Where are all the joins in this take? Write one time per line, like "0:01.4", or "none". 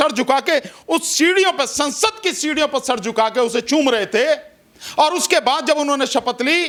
none